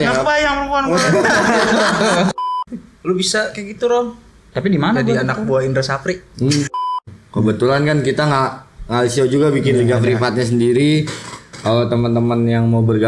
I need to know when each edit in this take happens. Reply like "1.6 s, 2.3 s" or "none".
2.3 s, 6.8 s